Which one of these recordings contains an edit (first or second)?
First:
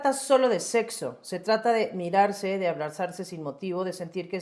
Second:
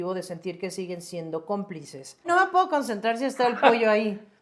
second